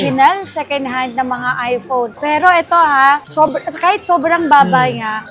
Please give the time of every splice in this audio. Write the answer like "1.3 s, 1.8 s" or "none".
none